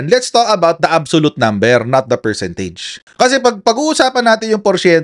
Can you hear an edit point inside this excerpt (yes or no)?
no